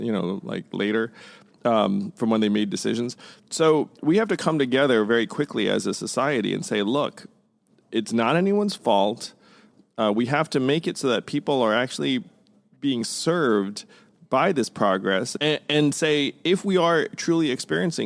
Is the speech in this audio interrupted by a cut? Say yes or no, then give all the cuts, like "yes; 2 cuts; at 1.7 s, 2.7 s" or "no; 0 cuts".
yes; 1 cut; at 15.3 s